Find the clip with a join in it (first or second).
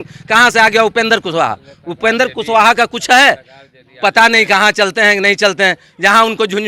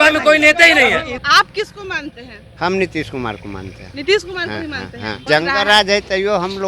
second